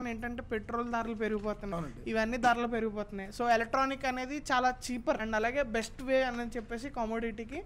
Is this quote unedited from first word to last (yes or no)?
yes